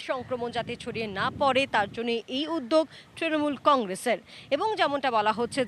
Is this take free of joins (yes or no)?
yes